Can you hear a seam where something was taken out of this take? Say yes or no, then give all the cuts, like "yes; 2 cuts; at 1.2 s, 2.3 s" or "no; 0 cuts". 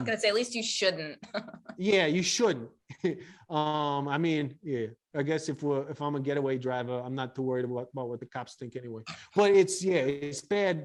no; 0 cuts